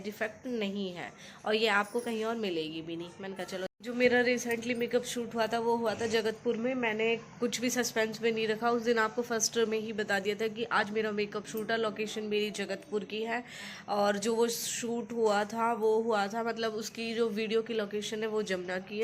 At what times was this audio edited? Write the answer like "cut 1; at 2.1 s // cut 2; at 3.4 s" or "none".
cut 1; at 3.7 s